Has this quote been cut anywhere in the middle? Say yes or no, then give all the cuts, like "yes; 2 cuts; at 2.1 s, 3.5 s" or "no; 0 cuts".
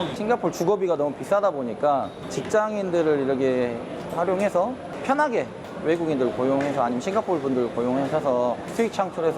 no; 0 cuts